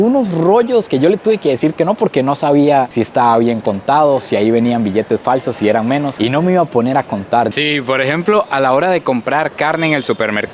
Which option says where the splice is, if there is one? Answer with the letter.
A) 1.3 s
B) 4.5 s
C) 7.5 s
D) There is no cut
C